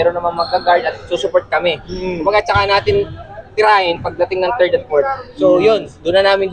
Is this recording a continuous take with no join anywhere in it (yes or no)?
yes